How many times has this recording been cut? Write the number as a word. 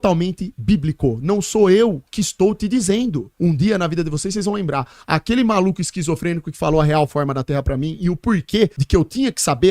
one